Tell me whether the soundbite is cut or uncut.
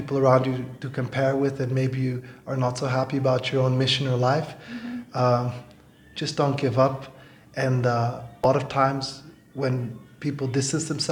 cut